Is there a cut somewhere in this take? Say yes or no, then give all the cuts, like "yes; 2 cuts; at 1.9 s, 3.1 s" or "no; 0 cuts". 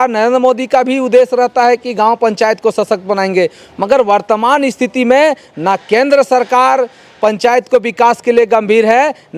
no; 0 cuts